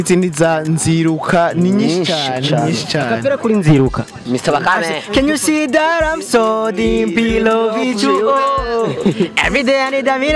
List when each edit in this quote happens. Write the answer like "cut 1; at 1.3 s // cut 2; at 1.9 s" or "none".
cut 1; at 4.2 s